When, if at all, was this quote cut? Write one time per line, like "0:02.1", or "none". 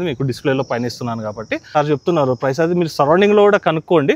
0:01.7